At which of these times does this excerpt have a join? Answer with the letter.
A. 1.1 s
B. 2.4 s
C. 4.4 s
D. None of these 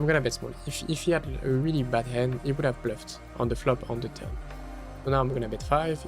B